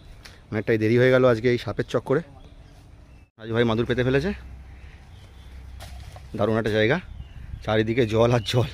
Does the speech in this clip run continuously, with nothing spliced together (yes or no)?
yes